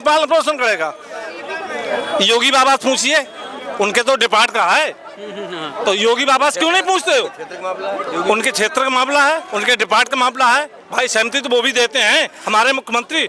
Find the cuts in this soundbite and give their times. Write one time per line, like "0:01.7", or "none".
none